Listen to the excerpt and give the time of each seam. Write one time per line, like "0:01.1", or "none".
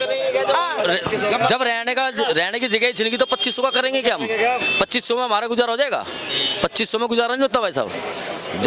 none